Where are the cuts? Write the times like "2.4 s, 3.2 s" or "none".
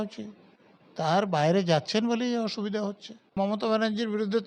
3.4 s